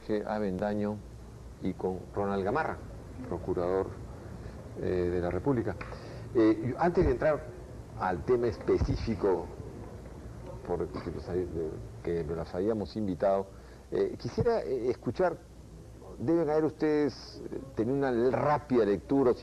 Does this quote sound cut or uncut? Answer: uncut